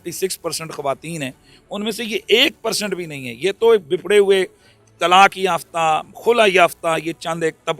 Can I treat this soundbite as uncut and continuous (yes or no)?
yes